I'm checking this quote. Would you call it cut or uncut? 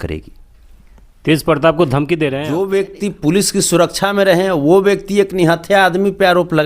cut